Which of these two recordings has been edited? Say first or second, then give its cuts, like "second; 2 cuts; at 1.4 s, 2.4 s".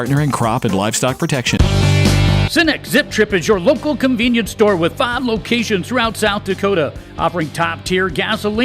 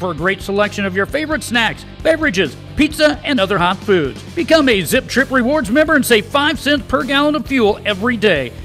first; 1 cut; at 1.6 s